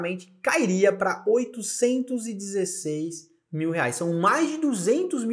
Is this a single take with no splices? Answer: yes; 0 cuts

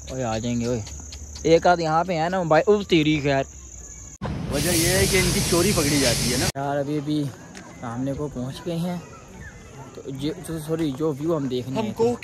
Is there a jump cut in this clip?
yes; 2 cuts; at 4.4 s, 6.6 s

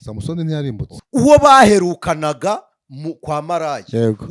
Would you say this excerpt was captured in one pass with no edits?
no; 1 cut; at 1.0 s

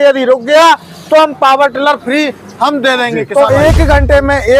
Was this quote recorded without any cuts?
no; 1 cut; at 3.2 s

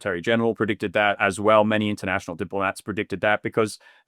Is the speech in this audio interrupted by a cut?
yes; 1 cut; at 1.2 s

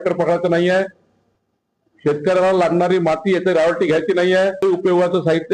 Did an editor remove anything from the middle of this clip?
yes; 1 cut; at 4.6 s

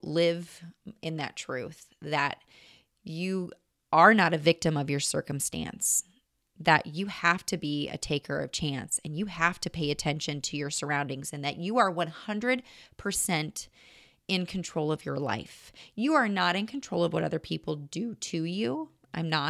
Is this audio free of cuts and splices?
yes; 0 cuts

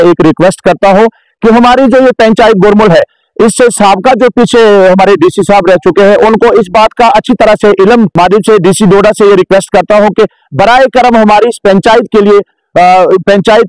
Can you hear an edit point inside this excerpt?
yes; 1 cut; at 8.1 s

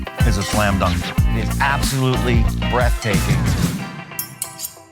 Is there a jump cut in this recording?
no; 0 cuts

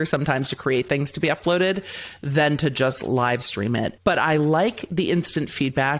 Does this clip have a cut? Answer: yes; 1 cut; at 4.0 s

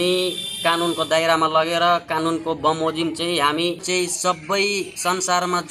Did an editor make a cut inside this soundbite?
yes; 1 cut; at 3.8 s

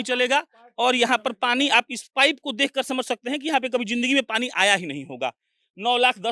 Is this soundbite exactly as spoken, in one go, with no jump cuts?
yes; 0 cuts

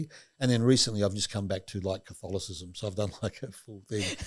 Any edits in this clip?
no; 0 cuts

